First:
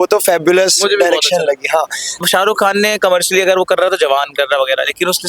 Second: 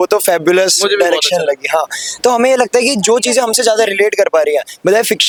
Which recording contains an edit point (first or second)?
first